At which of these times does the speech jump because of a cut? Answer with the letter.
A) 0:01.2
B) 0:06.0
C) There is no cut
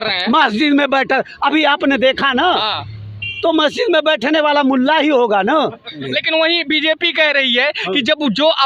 B